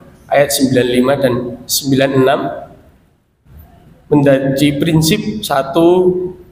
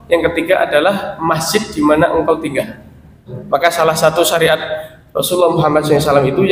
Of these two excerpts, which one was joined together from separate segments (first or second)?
second